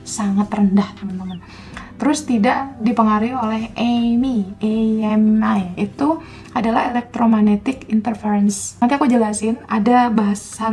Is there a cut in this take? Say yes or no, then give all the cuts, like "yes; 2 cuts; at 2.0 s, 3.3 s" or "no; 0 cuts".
no; 0 cuts